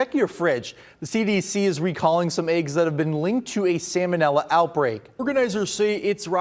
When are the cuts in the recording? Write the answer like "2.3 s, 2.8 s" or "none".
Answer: 5.1 s

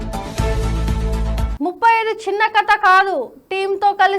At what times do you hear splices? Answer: 1.5 s

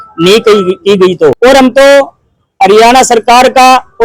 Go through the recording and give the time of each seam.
1.4 s

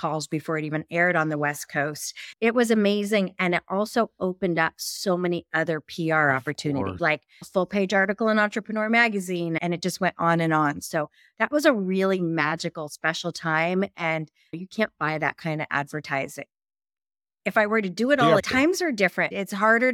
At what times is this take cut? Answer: 2.4 s, 7.4 s, 18.4 s

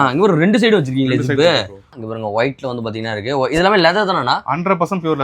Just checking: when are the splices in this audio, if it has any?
2.0 s

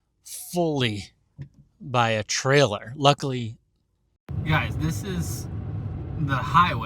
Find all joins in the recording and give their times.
4.2 s

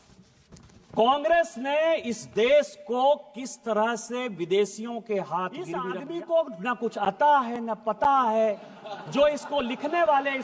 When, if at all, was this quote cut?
5.9 s

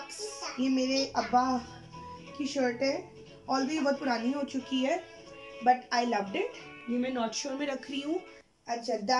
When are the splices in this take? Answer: none

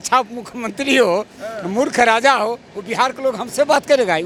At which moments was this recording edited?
none

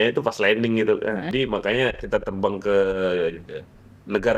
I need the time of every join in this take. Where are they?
1.3 s

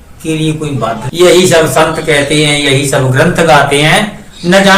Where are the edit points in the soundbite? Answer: 1.1 s

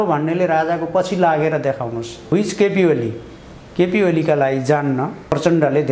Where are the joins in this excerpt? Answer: 2.3 s

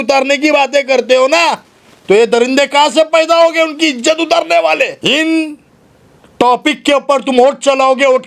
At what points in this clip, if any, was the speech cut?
4.9 s

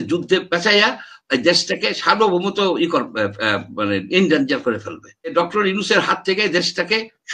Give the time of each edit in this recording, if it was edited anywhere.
5.3 s

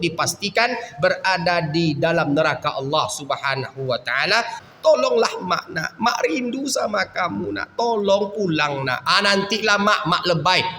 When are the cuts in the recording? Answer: 4.6 s

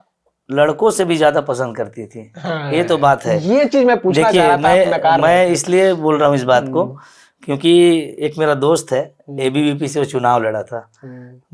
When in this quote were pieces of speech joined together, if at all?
none

